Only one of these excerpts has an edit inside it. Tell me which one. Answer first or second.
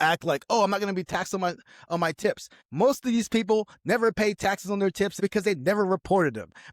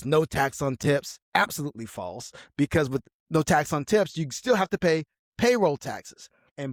first